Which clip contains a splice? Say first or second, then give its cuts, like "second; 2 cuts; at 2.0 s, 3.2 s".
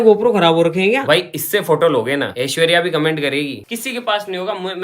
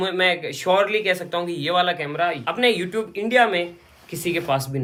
first; 3 cuts; at 1.0 s, 2.3 s, 3.7 s